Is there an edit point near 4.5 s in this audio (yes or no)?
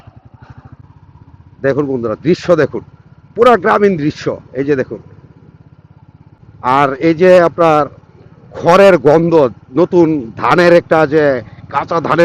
no